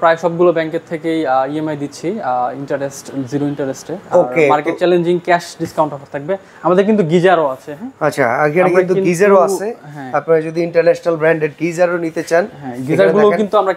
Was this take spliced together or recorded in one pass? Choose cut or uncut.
uncut